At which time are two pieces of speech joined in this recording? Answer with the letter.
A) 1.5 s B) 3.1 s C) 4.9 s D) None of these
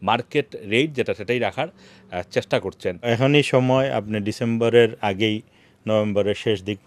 B